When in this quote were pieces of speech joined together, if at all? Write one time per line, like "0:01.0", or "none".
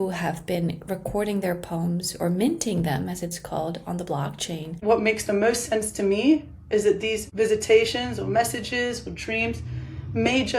0:04.8
0:07.2